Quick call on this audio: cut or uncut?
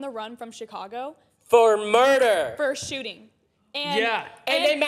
uncut